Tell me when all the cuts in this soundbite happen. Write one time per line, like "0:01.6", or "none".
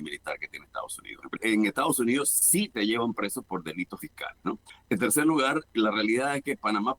0:01.4
0:04.4